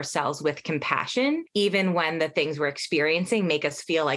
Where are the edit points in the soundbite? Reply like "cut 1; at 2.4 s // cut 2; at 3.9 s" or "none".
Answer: cut 1; at 1.5 s